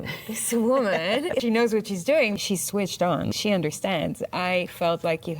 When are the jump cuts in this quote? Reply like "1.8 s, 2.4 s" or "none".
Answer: 1.4 s, 2.4 s, 3.3 s